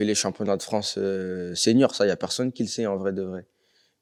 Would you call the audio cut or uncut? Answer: uncut